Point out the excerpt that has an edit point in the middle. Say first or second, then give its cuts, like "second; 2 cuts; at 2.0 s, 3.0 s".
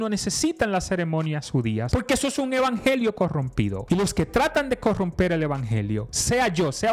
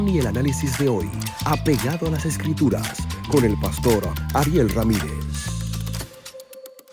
first; 2 cuts; at 1.9 s, 3.8 s